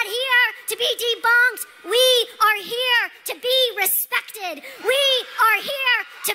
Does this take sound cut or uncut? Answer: uncut